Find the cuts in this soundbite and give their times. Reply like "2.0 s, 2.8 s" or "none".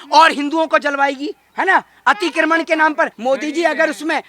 3.1 s

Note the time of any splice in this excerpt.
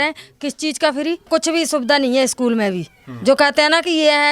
1.3 s

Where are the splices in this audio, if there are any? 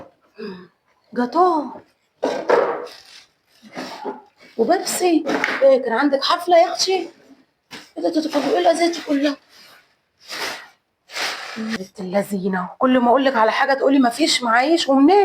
11.8 s

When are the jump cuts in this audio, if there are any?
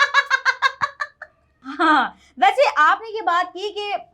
1.6 s

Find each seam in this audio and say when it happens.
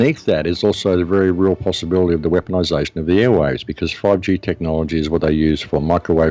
none

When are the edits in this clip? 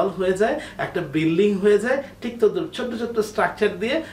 none

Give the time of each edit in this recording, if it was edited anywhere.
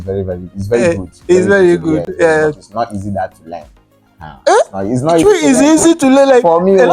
none

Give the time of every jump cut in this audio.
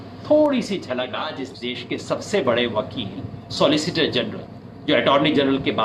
1.5 s

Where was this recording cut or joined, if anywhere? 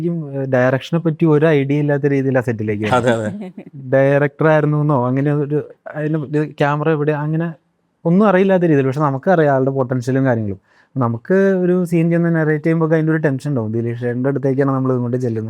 none

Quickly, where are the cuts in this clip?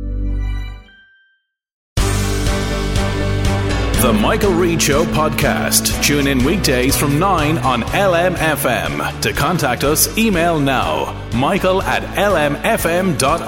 1.9 s

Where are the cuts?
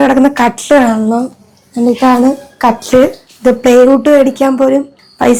none

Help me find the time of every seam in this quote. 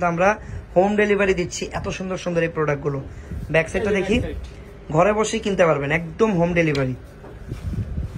none

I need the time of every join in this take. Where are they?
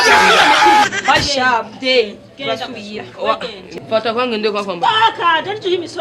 3.7 s

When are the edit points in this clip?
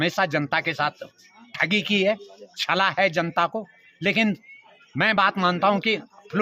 none

